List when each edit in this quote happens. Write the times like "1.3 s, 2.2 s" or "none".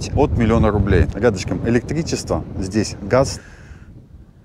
1.1 s, 3.4 s